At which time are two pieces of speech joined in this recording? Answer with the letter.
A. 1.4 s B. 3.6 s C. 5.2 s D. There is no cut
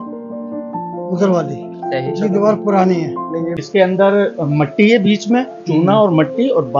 B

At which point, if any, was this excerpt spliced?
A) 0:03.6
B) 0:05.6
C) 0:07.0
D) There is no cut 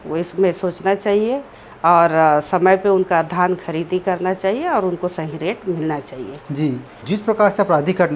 C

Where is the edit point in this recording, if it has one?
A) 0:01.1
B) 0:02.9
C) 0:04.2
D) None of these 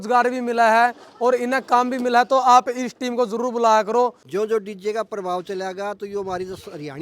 C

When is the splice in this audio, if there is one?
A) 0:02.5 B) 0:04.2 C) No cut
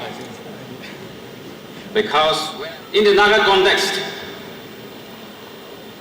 A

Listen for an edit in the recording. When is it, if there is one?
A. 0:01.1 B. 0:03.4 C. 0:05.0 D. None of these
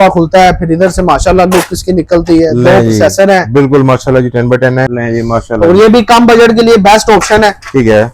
C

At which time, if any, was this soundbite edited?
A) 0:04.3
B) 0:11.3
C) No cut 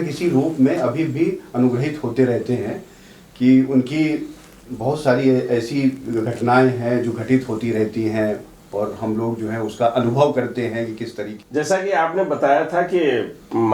B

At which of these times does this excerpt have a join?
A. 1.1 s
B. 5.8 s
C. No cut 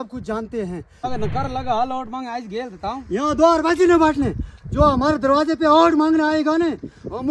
A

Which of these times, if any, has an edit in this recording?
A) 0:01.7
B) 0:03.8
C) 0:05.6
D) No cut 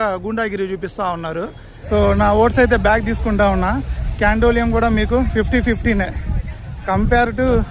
A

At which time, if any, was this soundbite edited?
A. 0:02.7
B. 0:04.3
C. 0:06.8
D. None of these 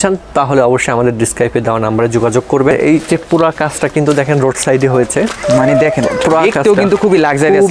A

